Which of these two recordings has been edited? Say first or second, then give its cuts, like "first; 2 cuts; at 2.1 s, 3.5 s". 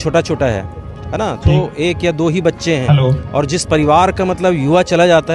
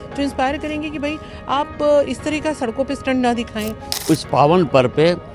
second; 1 cut; at 3.9 s